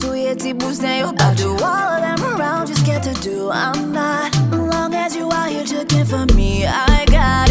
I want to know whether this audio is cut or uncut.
uncut